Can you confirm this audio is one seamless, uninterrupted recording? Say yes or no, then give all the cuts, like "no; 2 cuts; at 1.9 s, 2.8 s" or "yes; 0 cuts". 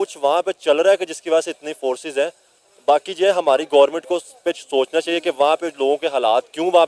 yes; 0 cuts